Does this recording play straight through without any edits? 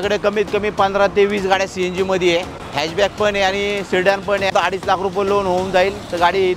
no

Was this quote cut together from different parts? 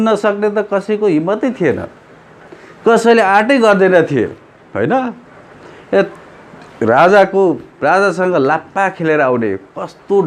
no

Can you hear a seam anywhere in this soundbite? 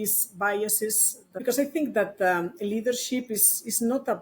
yes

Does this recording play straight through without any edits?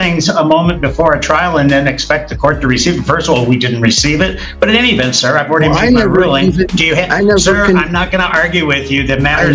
yes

